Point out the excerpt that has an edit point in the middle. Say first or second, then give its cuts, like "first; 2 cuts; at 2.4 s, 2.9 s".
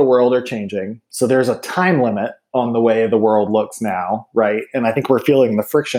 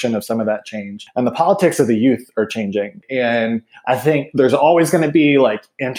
second; 2 cuts; at 1.0 s, 3.0 s